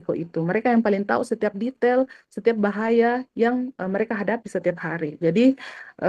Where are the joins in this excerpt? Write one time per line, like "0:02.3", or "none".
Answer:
none